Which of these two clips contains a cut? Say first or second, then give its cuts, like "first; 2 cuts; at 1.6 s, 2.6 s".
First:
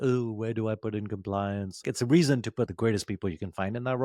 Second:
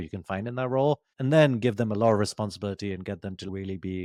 first; 1 cut; at 1.9 s